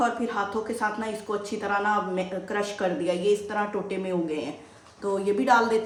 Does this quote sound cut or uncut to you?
uncut